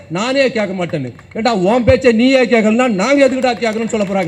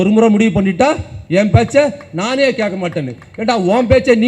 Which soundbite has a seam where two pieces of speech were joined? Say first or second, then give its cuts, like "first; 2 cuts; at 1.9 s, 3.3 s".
second; 1 cut; at 1.1 s